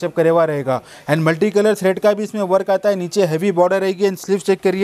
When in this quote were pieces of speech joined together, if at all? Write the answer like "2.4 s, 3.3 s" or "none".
none